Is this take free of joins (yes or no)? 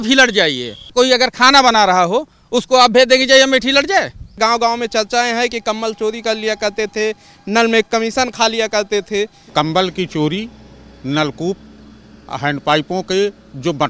no